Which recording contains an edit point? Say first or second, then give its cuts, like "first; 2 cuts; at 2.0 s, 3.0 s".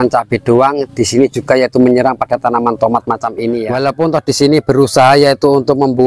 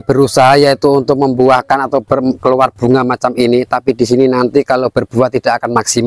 first; 1 cut; at 3.7 s